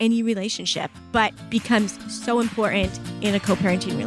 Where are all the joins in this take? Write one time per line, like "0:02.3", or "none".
0:01.4
0:02.1
0:03.0